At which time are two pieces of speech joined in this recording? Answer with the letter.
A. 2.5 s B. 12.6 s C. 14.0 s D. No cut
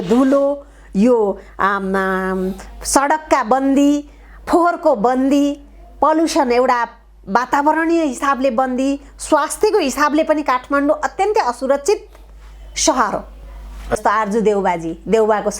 C